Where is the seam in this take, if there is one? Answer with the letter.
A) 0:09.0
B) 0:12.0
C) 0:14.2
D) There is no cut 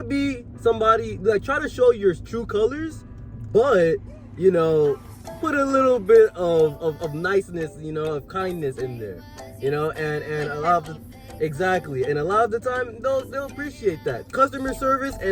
C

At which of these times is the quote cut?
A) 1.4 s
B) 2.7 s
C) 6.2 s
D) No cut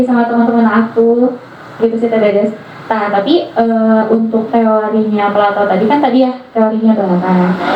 D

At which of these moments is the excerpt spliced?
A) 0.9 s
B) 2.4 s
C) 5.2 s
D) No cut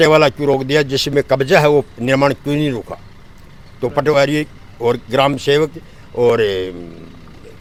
D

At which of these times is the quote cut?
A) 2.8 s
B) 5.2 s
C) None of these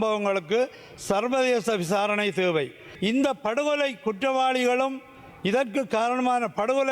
A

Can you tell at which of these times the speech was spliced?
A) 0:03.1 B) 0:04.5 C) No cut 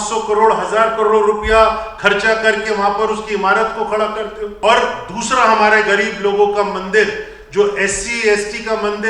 B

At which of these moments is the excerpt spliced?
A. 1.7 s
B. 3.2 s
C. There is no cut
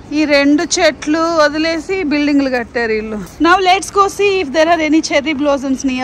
B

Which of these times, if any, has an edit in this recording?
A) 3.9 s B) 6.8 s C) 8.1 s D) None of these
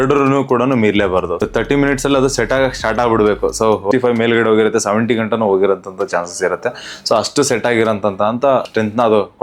A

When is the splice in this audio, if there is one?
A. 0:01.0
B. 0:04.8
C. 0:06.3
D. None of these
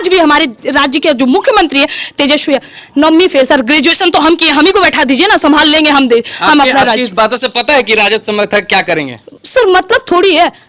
D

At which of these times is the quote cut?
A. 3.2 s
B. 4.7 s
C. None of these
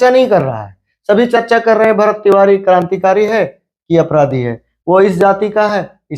C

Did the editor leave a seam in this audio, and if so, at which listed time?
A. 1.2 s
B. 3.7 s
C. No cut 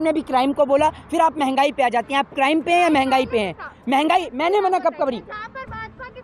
C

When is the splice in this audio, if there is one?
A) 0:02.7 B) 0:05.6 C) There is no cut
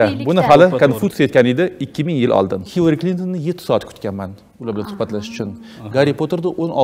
A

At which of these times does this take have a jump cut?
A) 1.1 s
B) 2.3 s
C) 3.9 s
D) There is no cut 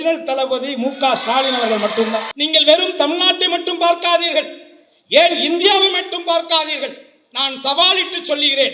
B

